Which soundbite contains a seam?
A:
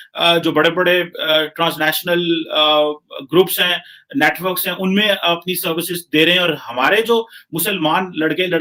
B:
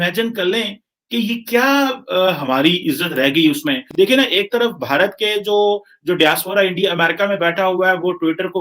B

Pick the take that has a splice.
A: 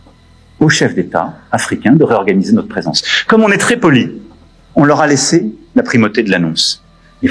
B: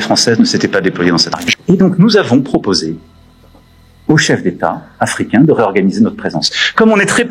B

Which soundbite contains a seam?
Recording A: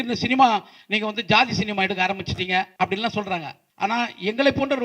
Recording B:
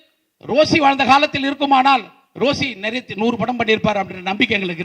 A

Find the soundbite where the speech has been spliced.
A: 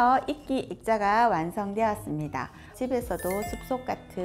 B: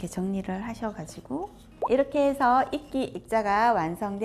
A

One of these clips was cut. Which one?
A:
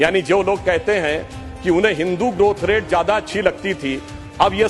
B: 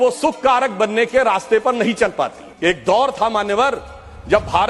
B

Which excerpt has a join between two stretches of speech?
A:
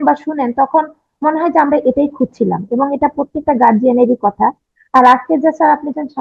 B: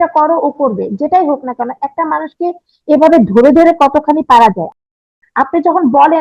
B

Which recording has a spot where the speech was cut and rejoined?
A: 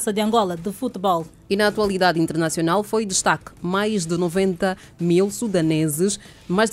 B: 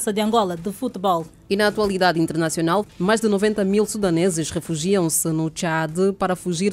B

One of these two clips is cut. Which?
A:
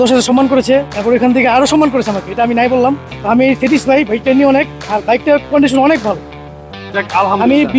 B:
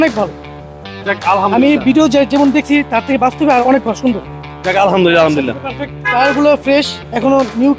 A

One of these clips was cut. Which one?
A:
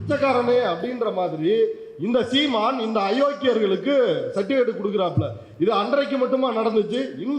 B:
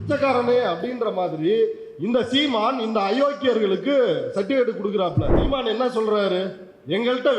B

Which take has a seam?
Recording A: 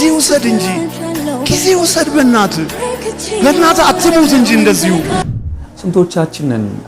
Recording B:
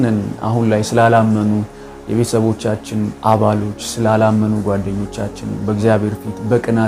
A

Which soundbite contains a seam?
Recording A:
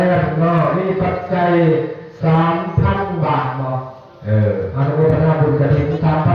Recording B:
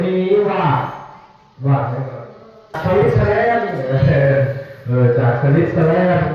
B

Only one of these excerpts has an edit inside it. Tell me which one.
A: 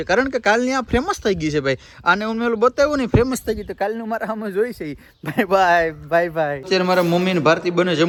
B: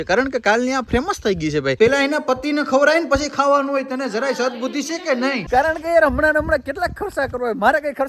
B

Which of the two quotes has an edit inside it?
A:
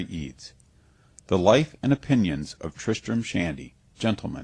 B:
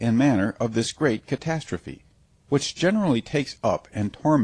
A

